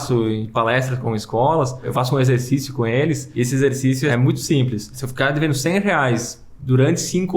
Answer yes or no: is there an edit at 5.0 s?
yes